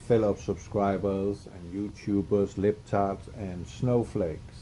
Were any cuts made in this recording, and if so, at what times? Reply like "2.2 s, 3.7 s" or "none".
none